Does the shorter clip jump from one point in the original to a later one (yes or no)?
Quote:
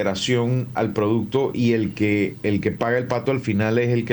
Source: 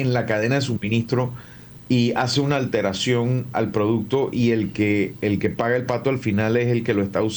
no